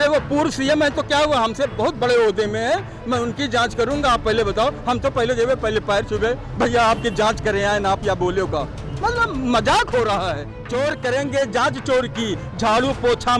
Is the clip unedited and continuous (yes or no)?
no